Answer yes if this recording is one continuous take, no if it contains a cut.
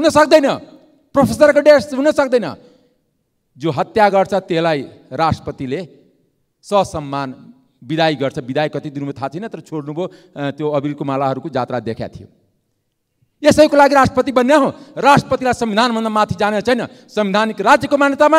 yes